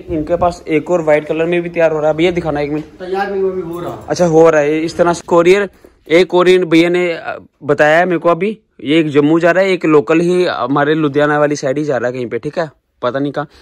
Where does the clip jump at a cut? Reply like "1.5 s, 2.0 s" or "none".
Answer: 5.2 s